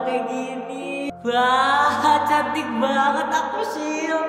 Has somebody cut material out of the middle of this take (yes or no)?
yes